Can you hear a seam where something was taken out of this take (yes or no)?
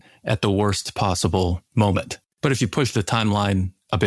yes